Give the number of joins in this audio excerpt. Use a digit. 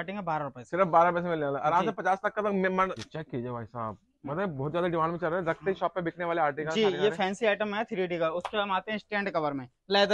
1